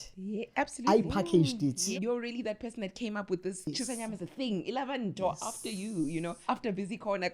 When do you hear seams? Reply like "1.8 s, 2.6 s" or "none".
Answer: 1.9 s, 3.7 s, 6.4 s